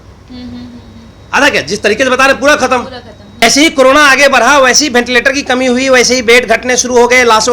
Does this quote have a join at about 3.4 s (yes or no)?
yes